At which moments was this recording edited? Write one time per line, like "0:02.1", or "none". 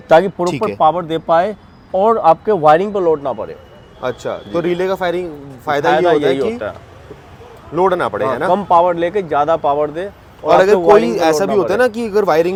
none